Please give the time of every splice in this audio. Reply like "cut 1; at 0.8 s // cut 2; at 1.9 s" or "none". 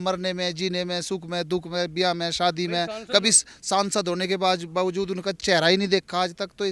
none

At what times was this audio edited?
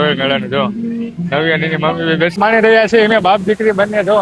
cut 1; at 2.3 s

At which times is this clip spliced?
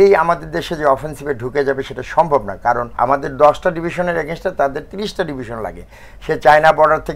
cut 1; at 2.9 s

